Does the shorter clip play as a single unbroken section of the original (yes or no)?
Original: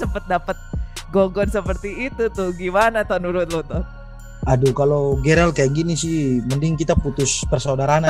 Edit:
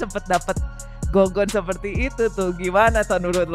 yes